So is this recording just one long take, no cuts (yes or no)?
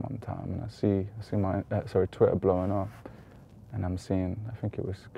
yes